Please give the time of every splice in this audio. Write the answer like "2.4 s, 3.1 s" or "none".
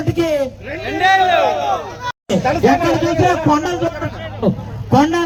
none